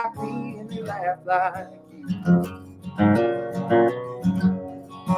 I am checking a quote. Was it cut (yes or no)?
no